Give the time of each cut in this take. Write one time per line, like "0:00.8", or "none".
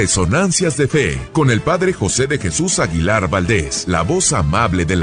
0:01.2
0:03.7